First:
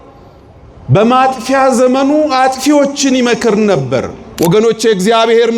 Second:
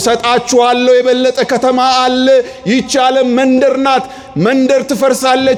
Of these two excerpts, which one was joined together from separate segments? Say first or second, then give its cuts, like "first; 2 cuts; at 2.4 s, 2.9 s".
first; 1 cut; at 4.2 s